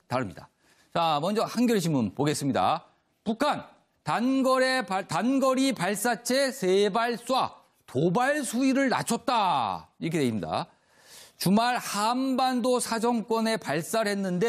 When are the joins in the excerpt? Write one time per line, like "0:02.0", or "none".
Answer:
0:04.2